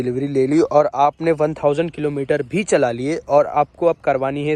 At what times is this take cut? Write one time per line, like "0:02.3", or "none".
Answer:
none